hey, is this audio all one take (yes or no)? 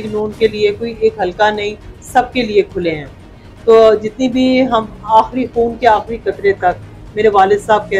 yes